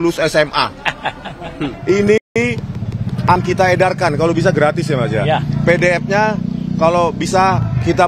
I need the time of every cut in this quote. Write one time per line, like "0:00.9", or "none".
0:01.7